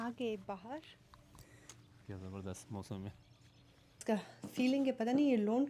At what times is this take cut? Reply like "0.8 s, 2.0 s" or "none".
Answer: 4.0 s